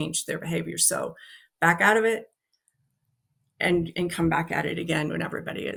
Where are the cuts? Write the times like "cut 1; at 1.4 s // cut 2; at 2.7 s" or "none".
none